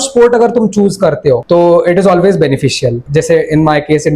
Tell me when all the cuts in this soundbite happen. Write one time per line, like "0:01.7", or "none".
0:01.4
0:03.0